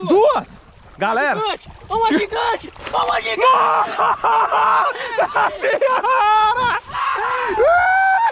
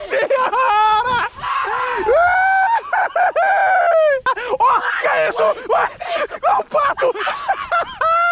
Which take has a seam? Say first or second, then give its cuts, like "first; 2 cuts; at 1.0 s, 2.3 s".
second; 1 cut; at 4.3 s